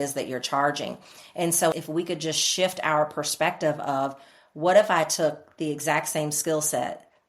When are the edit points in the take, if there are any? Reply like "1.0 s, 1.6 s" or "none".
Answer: 1.7 s